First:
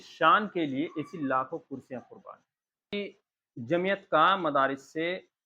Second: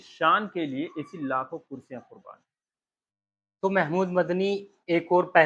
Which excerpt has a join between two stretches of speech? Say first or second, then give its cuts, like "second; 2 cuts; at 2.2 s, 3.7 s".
first; 1 cut; at 2.9 s